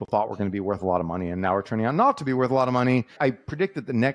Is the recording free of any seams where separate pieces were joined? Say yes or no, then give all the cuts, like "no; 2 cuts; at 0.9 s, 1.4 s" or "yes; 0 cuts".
no; 1 cut; at 3.1 s